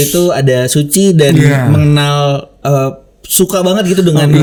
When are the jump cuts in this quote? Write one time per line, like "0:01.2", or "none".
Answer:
none